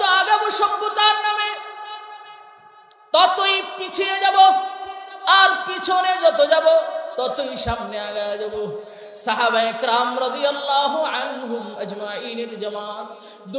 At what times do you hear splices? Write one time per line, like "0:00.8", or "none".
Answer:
none